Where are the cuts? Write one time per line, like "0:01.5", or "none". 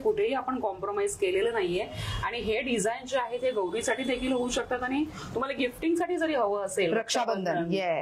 none